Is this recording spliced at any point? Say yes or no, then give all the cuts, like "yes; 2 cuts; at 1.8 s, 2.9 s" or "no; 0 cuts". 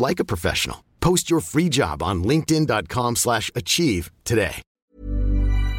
yes; 1 cut; at 4.7 s